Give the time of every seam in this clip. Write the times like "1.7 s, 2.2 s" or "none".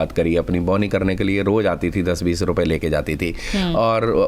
none